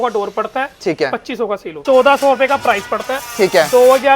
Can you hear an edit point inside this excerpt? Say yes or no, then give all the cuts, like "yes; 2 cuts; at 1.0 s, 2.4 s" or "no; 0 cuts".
yes; 1 cut; at 1.8 s